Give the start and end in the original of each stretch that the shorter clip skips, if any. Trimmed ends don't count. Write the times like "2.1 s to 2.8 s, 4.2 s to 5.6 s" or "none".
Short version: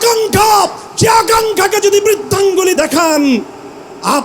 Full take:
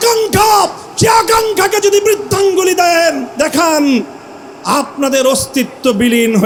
2.7 s to 3.4 s